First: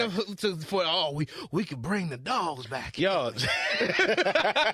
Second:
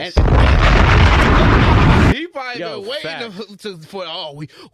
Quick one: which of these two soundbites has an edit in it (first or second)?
second